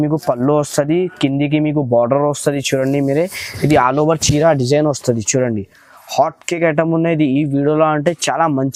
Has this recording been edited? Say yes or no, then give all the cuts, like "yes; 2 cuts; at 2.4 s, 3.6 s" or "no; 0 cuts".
no; 0 cuts